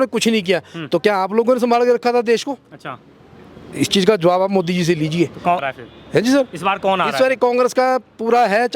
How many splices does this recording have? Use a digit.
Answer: 0